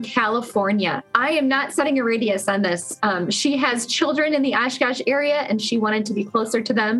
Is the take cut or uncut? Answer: cut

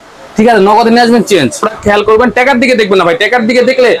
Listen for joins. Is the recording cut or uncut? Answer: cut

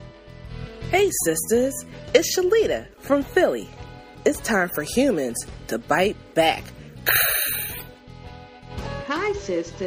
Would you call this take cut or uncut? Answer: uncut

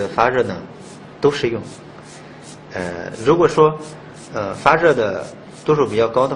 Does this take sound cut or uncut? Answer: cut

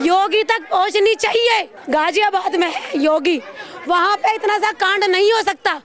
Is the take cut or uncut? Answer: cut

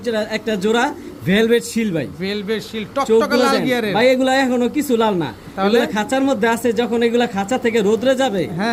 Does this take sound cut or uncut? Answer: uncut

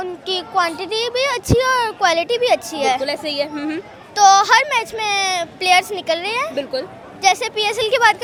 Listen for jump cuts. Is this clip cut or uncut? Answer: uncut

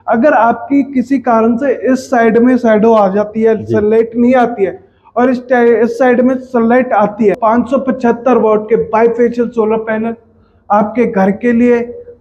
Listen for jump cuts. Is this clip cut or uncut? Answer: cut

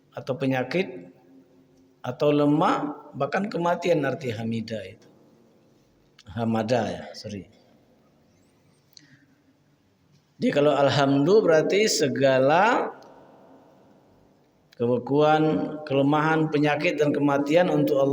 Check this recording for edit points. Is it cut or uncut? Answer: uncut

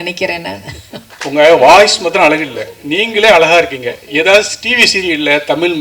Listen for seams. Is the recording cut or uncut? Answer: cut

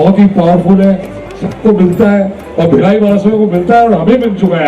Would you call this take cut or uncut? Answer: uncut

